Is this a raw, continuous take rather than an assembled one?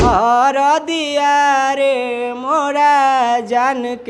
yes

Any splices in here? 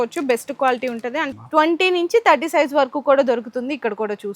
yes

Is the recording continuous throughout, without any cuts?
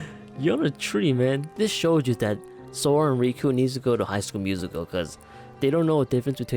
no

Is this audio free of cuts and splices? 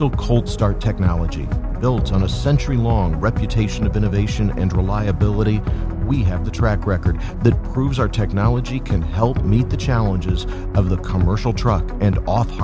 yes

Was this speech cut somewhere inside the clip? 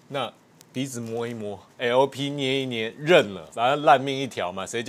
yes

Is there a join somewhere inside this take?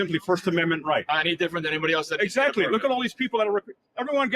yes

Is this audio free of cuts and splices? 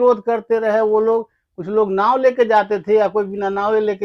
yes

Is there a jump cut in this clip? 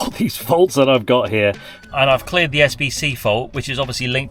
yes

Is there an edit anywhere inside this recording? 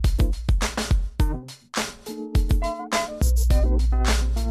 no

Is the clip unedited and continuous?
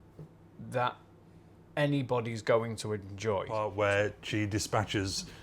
no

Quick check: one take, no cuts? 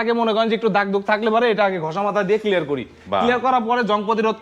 yes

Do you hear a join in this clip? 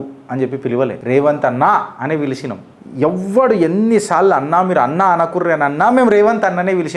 yes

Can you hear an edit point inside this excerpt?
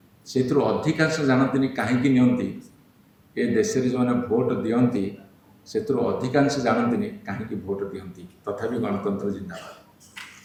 no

